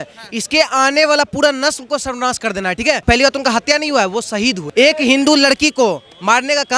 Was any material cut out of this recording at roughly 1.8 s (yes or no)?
no